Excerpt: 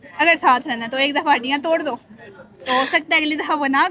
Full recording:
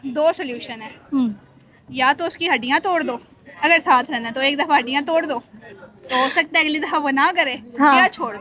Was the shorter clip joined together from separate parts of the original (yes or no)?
no